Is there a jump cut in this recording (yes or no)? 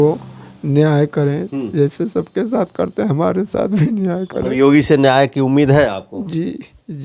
no